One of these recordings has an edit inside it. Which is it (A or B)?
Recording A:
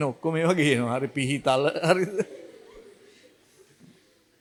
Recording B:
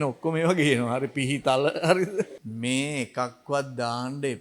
B